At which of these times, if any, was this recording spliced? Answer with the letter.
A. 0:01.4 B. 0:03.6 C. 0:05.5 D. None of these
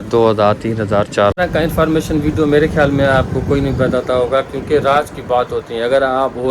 A